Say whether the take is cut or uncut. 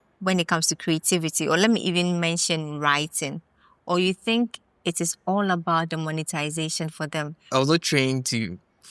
cut